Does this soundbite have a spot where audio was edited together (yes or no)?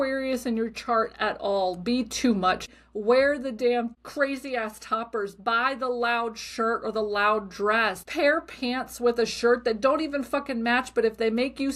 yes